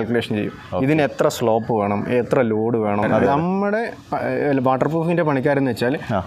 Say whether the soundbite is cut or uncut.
cut